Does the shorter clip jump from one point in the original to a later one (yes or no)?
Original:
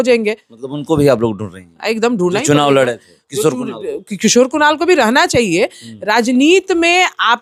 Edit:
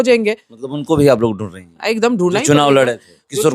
no